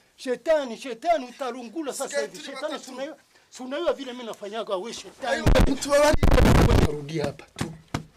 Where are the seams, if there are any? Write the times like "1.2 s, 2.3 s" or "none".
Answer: 6.9 s